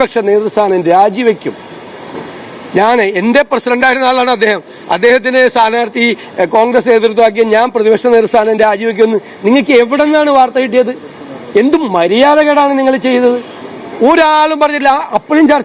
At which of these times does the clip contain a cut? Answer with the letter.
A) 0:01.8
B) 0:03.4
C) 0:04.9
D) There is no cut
D